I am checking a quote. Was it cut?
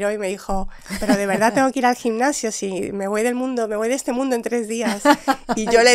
no; 0 cuts

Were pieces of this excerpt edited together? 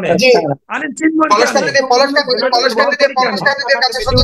no; 0 cuts

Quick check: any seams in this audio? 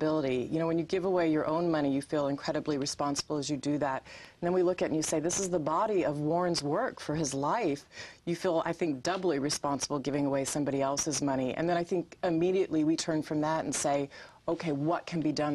no; 0 cuts

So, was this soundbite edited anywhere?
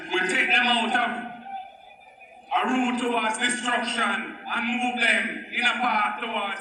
no; 0 cuts

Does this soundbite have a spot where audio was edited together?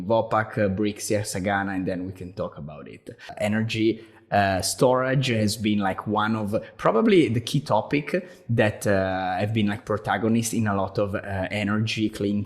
yes; 1 cut; at 3.3 s

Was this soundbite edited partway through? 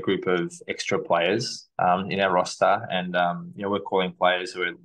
no; 0 cuts

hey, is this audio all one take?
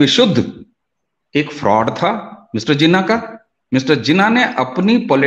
yes; 0 cuts

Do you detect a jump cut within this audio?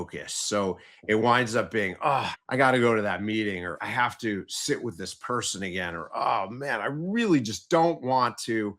yes; 2 cuts; at 2.4 s, 3.7 s

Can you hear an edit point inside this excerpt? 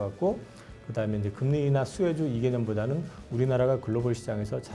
no; 0 cuts

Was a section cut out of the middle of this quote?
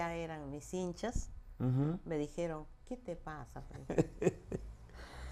no; 0 cuts

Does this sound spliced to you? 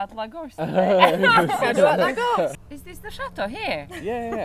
yes; 1 cut; at 2.5 s

